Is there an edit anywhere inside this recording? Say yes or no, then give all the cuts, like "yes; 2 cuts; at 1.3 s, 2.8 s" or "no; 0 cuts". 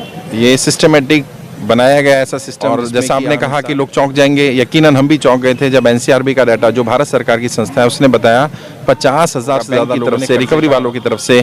yes; 2 cuts; at 2.5 s, 10.0 s